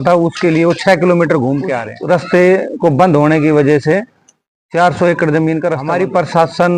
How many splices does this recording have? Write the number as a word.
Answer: two